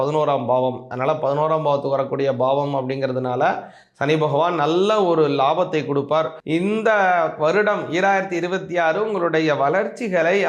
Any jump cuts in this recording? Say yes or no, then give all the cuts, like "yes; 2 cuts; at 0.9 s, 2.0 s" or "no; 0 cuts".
yes; 1 cut; at 6.4 s